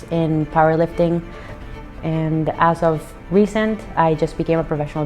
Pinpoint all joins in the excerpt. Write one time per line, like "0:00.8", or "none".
0:01.7